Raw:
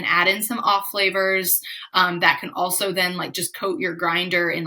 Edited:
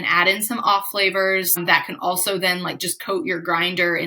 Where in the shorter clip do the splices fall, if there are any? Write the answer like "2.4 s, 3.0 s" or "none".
1.6 s